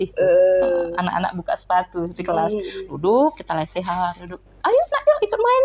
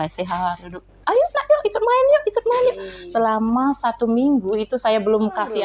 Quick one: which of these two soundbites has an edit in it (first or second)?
second